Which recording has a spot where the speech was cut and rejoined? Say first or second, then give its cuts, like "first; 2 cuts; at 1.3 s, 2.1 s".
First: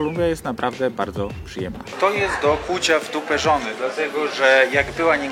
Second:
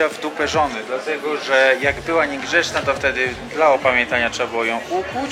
first; 1 cut; at 1.7 s